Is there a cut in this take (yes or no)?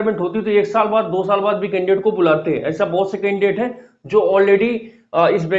no